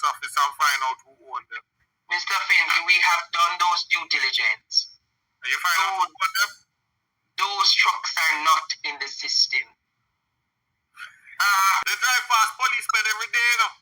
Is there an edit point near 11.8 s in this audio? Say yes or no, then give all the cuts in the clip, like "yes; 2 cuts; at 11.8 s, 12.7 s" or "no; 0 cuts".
yes; 1 cut; at 11.8 s